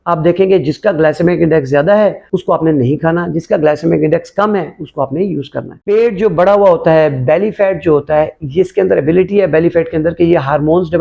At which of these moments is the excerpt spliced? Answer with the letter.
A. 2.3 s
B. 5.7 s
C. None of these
B